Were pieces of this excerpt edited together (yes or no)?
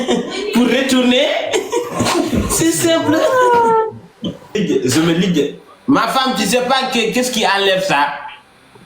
yes